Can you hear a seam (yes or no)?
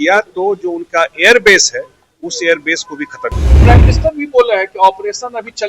yes